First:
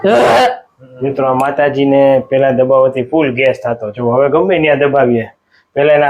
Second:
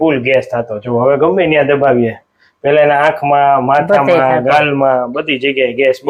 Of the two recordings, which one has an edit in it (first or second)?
first